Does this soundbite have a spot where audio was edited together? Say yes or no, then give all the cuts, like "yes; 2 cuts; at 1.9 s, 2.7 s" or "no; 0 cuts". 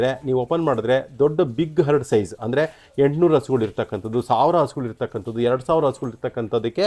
no; 0 cuts